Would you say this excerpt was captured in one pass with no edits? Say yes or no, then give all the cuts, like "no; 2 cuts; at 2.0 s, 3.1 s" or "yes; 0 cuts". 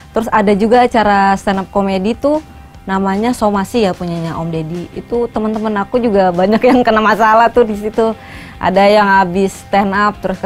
yes; 0 cuts